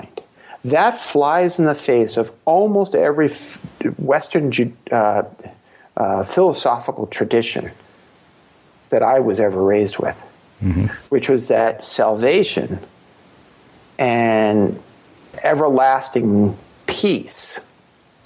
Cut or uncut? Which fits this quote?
cut